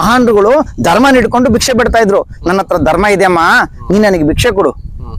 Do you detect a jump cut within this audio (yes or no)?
no